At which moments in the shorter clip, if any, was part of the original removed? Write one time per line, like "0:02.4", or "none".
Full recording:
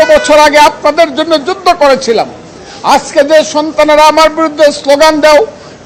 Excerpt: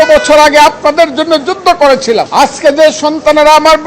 0:02.3